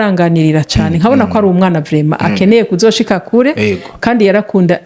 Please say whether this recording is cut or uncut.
uncut